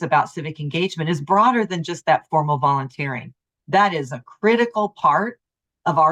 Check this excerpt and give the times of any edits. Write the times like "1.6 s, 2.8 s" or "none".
none